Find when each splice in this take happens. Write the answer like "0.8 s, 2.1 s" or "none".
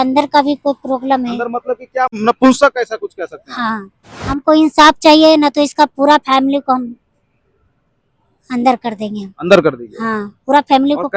2.2 s, 4.1 s